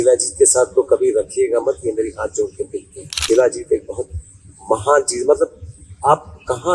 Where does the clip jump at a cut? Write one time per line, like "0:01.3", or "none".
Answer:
0:03.2